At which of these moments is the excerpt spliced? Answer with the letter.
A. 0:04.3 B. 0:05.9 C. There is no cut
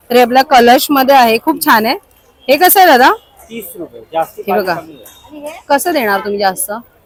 C